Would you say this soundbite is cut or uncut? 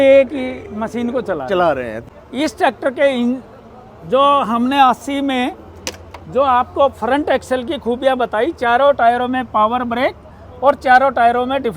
cut